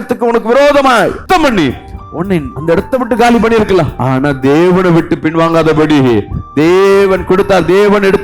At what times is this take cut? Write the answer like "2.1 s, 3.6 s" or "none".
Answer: 1.2 s, 2.5 s, 4.0 s

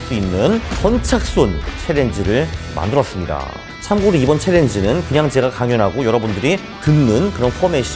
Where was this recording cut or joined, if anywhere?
none

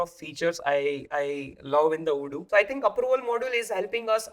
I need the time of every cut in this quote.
2.4 s

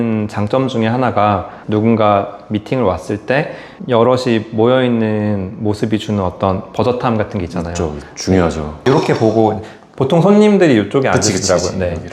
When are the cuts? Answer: none

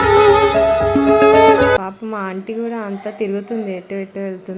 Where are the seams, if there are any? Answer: 1.9 s

